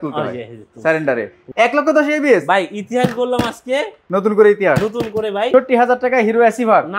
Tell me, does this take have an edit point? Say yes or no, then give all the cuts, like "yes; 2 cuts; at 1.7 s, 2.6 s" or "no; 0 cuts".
yes; 3 cuts; at 1.4 s, 4.0 s, 5.5 s